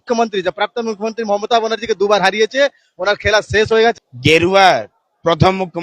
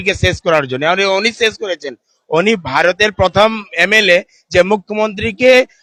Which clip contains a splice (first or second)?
first